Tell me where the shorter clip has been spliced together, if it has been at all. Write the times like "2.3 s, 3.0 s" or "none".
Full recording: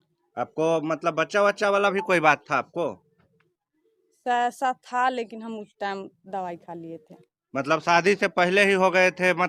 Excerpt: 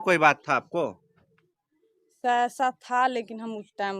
none

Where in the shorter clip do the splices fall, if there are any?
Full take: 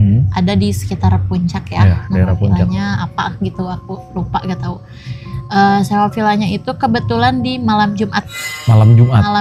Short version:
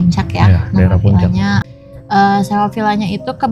1.7 s

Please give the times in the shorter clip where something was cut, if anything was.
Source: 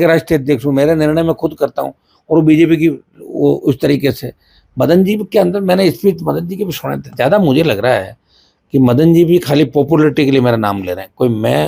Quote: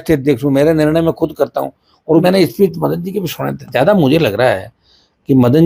2.2 s

